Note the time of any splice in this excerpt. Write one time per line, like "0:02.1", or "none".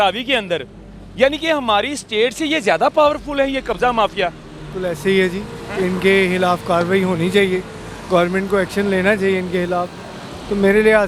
none